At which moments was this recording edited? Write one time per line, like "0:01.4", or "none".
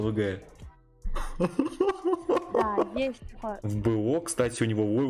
0:03.6